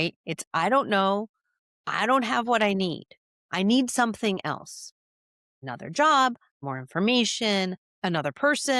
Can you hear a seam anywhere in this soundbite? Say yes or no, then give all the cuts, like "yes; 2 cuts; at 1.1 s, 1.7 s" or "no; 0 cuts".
yes; 3 cuts; at 5.6 s, 6.6 s, 7.9 s